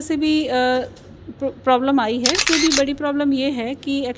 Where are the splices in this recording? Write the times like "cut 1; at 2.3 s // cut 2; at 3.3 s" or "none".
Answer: cut 1; at 2.4 s